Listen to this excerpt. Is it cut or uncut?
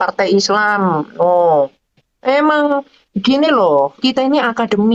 uncut